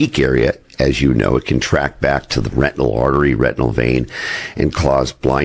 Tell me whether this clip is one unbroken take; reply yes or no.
yes